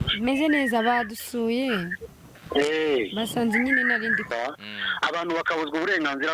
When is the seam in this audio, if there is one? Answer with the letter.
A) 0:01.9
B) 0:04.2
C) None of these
B